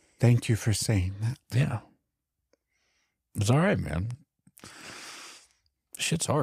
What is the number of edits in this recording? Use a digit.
0